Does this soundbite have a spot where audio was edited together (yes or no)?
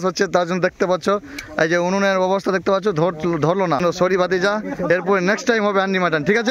yes